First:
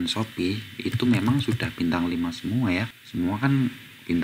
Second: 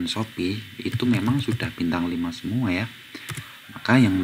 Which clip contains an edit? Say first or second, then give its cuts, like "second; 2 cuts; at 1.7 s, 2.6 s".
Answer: first; 1 cut; at 3.0 s